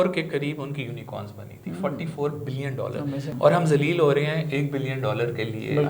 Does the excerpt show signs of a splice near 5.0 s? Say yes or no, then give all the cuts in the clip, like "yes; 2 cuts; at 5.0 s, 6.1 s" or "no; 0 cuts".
no; 1 cut; at 3.3 s